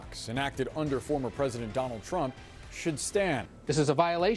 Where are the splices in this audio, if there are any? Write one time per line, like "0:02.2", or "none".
0:03.4